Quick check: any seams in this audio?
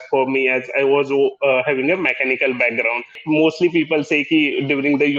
yes; 1 cut; at 3.2 s

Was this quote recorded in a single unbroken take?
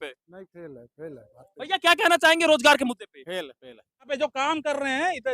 no; 1 cut; at 4.1 s

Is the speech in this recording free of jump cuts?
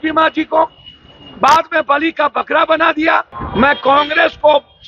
no; 1 cut; at 3.4 s

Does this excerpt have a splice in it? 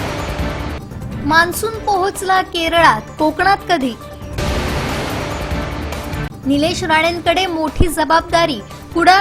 no; 0 cuts

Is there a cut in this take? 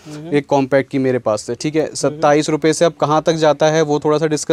no; 0 cuts

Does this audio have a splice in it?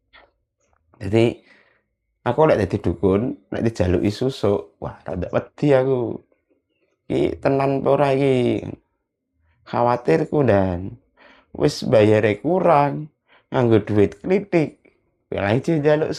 no; 0 cuts

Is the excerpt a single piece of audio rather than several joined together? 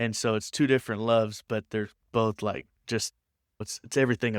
yes; 0 cuts

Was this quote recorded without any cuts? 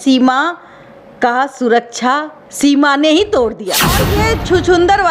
no; 1 cut; at 4.0 s

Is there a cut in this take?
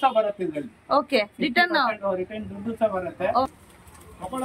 yes; 1 cut; at 3.5 s

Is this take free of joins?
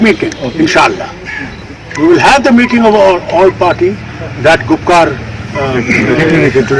yes; 0 cuts

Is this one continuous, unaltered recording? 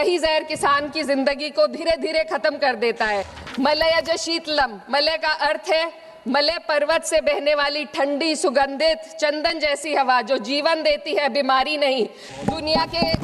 no; 2 cuts; at 3.4 s, 12.3 s

